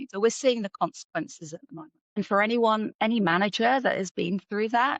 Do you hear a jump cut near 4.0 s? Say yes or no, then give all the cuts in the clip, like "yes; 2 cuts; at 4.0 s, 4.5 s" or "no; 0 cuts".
no; 1 cut; at 2.2 s